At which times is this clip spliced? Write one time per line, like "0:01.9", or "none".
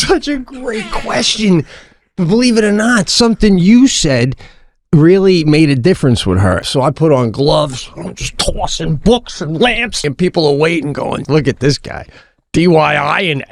0:06.6
0:10.0
0:11.2

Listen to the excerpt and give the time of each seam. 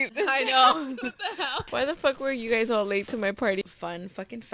0:01.6
0:03.6

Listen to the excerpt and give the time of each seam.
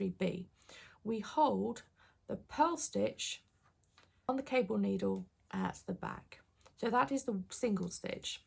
0:04.3

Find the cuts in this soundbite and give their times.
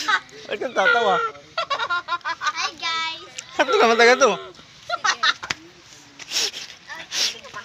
none

